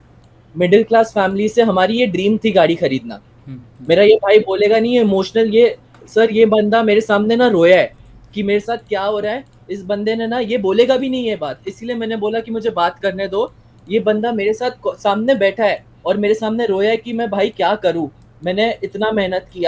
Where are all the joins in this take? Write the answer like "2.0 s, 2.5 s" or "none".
none